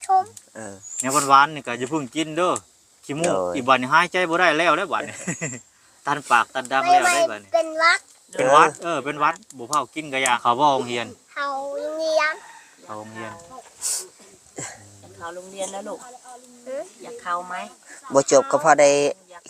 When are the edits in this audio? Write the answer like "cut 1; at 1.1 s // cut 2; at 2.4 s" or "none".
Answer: cut 1; at 10.4 s